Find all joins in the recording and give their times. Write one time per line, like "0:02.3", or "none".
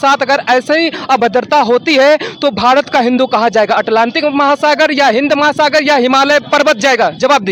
none

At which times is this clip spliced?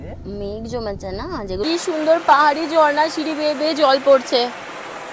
0:01.6

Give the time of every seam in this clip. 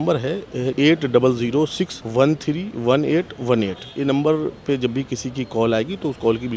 0:00.7
0:02.0
0:03.8

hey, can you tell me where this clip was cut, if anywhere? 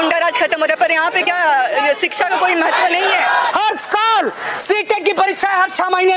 0:03.5

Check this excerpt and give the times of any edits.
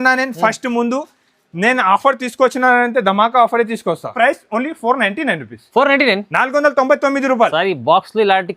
0:04.1

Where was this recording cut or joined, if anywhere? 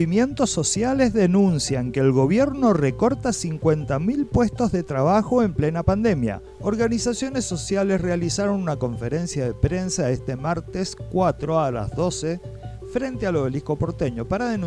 none

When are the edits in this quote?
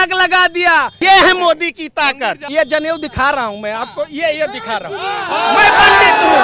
0:00.9
0:02.4

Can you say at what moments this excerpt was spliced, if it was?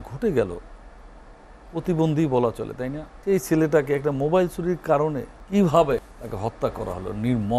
0:03.1
0:05.3
0:06.0

